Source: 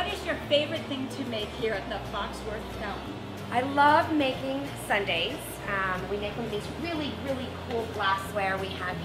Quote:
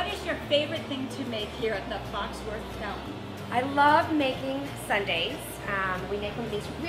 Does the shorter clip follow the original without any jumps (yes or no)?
yes